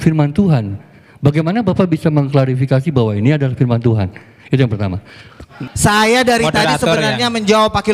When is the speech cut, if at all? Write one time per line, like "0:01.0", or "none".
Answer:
0:05.5